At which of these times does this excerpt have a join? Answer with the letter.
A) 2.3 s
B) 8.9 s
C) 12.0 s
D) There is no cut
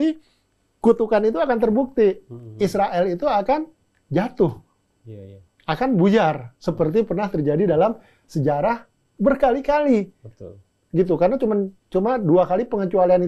D